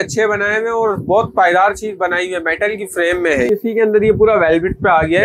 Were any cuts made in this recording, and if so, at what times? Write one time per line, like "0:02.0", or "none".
0:03.5